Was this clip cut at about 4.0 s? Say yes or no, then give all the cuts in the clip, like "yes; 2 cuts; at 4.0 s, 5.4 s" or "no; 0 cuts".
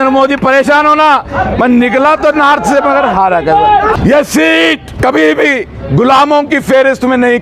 yes; 2 cuts; at 4.0 s, 4.9 s